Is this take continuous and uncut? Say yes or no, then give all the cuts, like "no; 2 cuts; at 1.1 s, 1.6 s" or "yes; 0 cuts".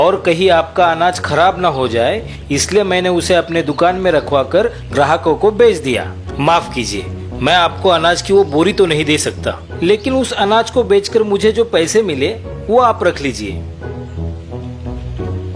yes; 0 cuts